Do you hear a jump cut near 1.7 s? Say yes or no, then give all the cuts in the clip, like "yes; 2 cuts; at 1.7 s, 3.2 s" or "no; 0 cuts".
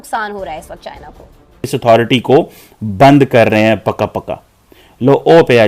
yes; 1 cut; at 1.7 s